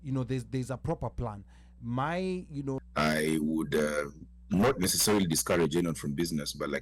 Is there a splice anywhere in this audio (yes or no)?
yes